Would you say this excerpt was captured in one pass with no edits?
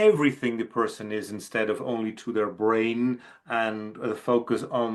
yes; 0 cuts

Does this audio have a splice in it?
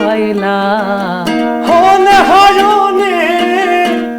no; 0 cuts

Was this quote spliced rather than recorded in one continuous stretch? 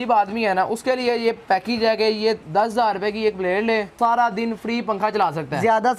yes; 2 cuts; at 2.4 s, 3.9 s

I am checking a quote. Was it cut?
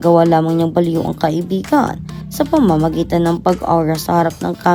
no; 0 cuts

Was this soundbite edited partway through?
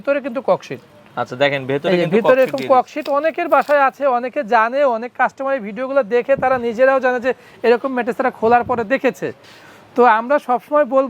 no; 0 cuts

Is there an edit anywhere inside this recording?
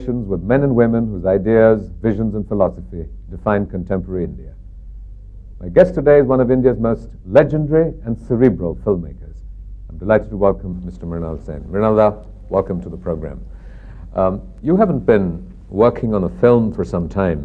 no; 0 cuts

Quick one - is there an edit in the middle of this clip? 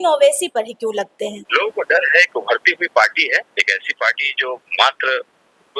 yes; 1 cut; at 1.4 s

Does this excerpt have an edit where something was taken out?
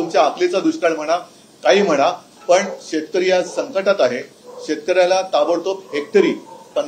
no; 0 cuts

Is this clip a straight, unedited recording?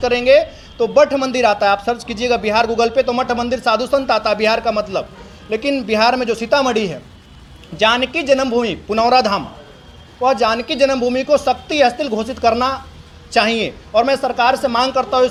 yes; 0 cuts

